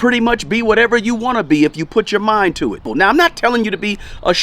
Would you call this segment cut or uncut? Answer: cut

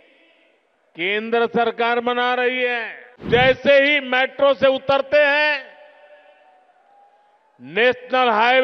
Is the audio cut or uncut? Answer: cut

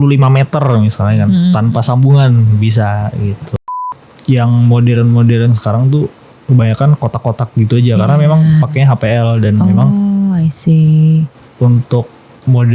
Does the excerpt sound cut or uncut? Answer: cut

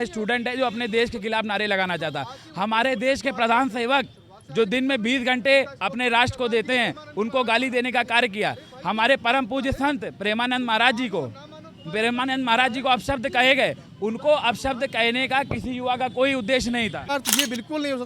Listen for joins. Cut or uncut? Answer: cut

